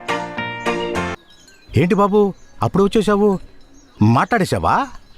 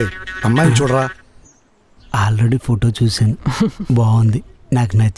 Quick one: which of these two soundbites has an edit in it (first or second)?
first